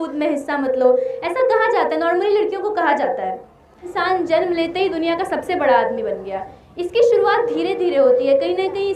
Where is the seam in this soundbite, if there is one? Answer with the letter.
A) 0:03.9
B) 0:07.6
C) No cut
A